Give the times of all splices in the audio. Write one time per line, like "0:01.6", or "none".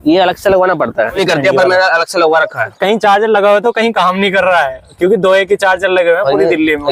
0:01.2
0:02.8